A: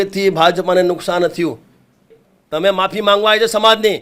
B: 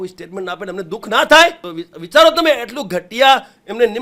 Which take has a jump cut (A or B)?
A